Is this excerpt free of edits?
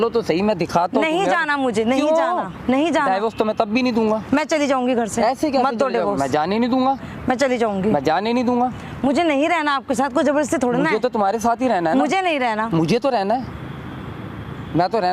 yes; 0 cuts

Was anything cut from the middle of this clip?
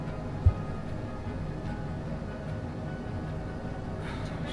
no; 0 cuts

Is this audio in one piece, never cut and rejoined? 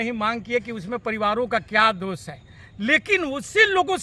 yes; 0 cuts

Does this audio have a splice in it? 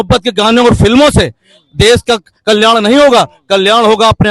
no; 0 cuts

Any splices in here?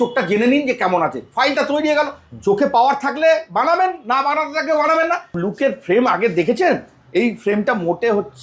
yes; 1 cut; at 5.4 s

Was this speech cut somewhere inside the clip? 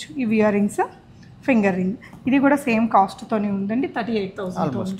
no; 0 cuts

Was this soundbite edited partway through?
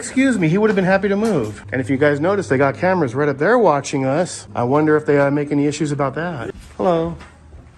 yes; 3 cuts; at 1.6 s, 4.4 s, 6.5 s

